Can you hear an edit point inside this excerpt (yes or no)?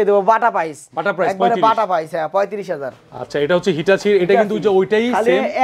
no